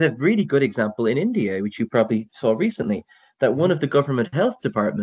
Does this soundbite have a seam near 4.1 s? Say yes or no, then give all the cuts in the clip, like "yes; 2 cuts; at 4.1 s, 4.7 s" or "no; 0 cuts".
no; 0 cuts